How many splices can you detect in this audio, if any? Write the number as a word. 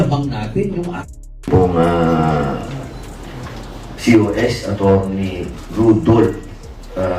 one